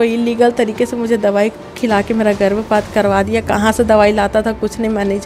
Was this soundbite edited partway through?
no; 0 cuts

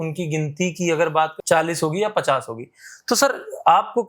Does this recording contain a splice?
yes; 1 cut; at 1.4 s

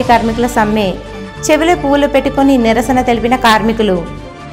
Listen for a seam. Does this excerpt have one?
no; 0 cuts

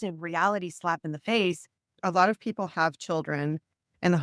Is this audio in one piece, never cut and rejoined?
no; 1 cut; at 1.8 s

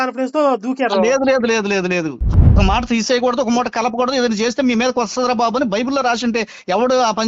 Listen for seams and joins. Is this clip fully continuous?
no; 1 cut; at 2.4 s

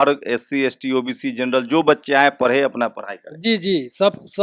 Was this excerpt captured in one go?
yes; 0 cuts

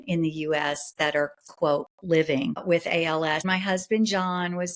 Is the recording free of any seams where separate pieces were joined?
no; 2 cuts; at 2.6 s, 3.4 s

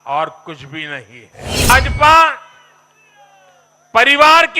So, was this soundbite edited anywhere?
yes; 1 cut; at 1.7 s

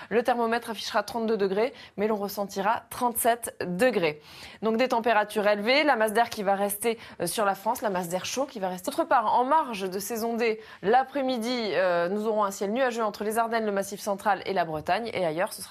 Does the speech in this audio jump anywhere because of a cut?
no; 0 cuts

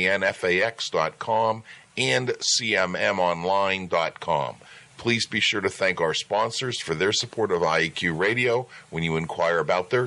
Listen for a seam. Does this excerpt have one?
no; 0 cuts

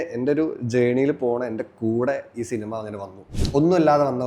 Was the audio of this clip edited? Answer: yes; 1 cut; at 3.3 s

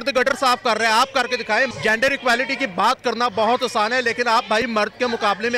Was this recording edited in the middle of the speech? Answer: yes; 1 cut; at 1.7 s

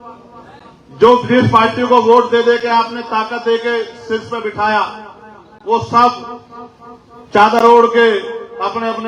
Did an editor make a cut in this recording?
no; 0 cuts

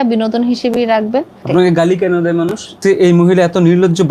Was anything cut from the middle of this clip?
yes; 2 cuts; at 1.5 s, 2.8 s

